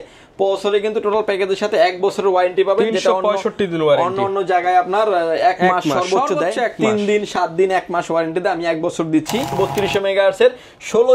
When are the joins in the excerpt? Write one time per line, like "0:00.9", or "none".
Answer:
0:09.6